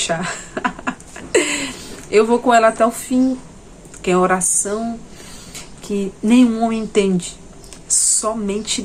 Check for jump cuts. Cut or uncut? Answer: uncut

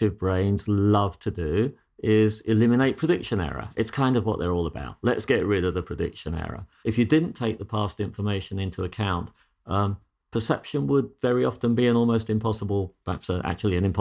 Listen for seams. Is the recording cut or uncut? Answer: cut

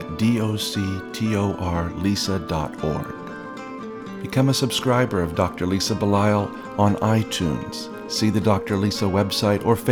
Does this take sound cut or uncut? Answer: uncut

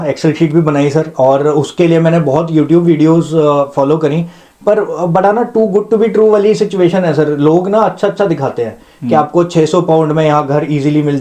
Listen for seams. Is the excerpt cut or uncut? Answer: uncut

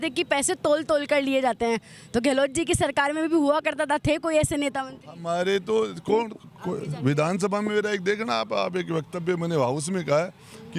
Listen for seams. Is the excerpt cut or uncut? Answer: uncut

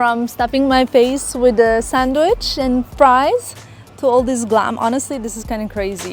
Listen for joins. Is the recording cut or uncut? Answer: uncut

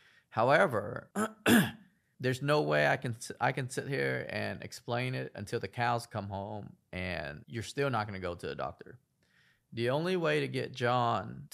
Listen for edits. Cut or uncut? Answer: uncut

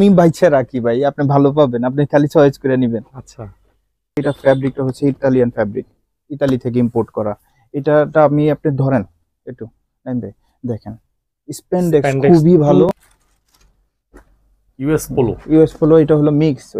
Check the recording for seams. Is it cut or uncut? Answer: cut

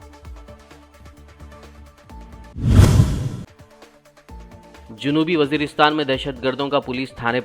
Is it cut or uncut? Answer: uncut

